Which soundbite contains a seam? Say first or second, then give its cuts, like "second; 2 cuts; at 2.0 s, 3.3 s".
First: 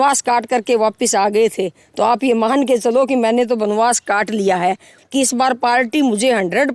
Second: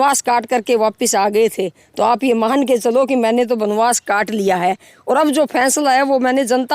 first; 1 cut; at 4.9 s